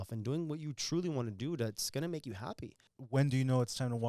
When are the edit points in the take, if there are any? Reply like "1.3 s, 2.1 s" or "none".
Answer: 2.9 s